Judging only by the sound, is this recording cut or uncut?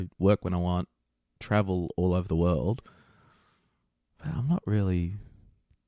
uncut